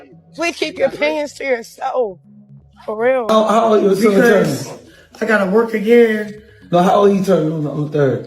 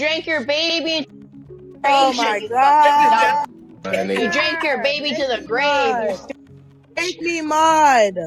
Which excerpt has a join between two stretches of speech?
first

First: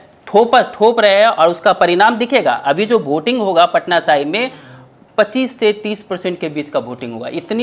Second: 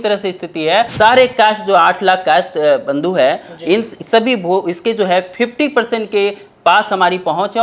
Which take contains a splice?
second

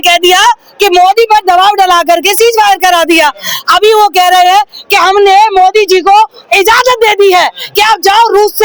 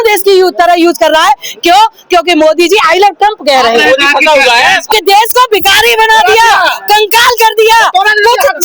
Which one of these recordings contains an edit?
second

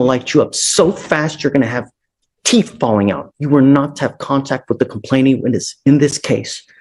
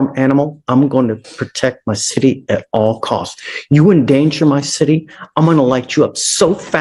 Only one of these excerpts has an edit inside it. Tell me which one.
first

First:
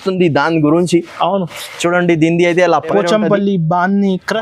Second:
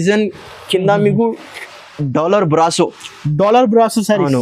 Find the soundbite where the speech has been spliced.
first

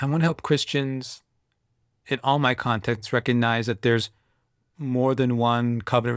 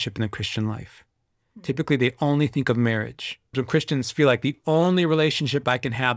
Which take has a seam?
second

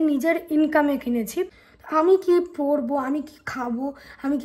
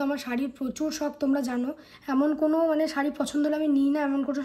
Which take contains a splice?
first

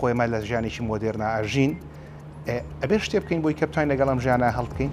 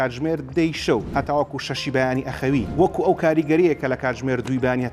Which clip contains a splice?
second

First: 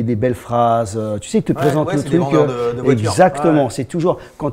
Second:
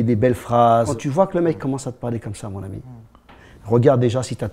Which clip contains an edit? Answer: second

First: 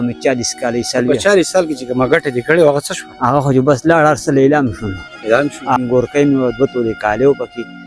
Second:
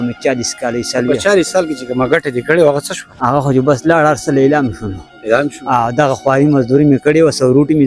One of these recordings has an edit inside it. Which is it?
first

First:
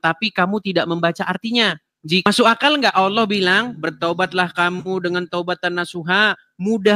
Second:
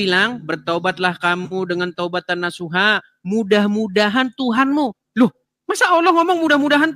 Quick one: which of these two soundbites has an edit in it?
first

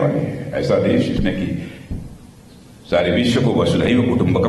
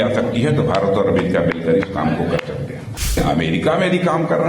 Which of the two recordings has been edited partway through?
second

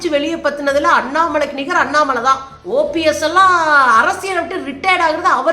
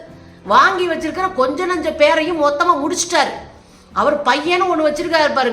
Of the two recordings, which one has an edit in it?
first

